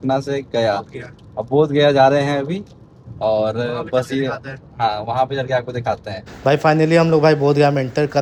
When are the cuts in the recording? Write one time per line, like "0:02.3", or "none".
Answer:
none